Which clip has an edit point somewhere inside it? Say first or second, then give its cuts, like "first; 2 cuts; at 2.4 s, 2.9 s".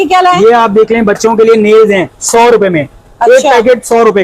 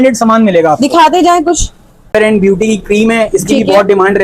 second; 1 cut; at 2.1 s